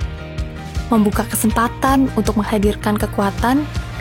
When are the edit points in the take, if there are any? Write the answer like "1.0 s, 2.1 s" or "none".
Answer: none